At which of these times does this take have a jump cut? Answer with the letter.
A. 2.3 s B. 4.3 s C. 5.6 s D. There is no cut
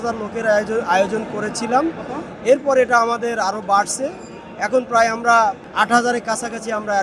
C